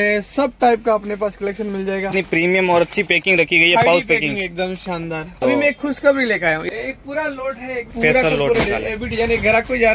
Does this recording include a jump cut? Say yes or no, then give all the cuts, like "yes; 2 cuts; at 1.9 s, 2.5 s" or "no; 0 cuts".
yes; 4 cuts; at 2.1 s, 5.3 s, 6.6 s, 7.9 s